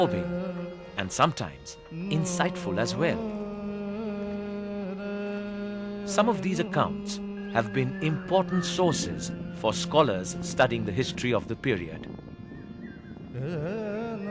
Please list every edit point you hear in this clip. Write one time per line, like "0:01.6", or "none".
0:13.3